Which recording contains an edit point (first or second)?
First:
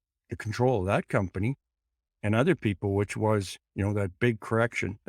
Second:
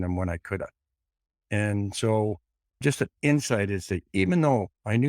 second